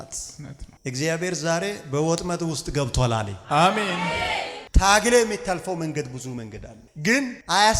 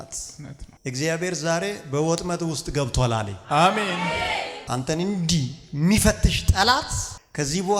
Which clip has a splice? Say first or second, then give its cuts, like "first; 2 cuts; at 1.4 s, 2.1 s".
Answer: first; 1 cut; at 4.5 s